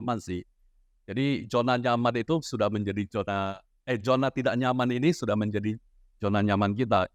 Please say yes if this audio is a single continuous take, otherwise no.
yes